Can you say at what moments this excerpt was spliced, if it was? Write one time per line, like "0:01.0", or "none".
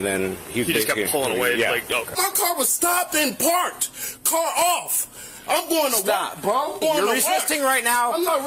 0:02.1
0:06.8